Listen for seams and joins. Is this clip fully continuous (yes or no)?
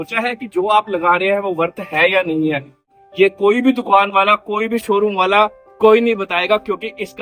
no